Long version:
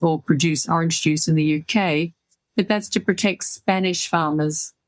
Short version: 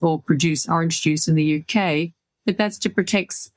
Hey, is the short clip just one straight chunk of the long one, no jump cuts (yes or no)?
no